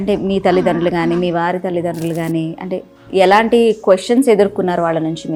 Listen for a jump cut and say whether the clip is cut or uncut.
uncut